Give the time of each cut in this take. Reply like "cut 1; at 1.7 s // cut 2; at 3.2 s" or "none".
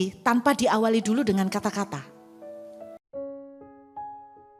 none